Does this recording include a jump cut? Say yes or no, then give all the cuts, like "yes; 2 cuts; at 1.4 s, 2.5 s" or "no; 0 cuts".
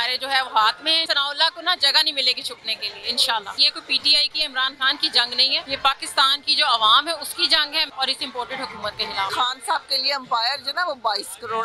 yes; 5 cuts; at 1.0 s, 3.7 s, 5.6 s, 7.9 s, 9.3 s